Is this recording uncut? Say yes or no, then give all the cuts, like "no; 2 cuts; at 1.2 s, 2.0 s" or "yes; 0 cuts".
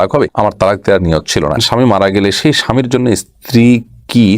no; 1 cut; at 1.6 s